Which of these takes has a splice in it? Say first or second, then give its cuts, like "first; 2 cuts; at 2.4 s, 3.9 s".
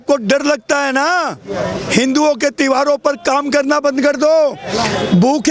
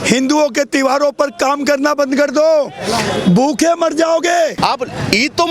second; 1 cut; at 4.6 s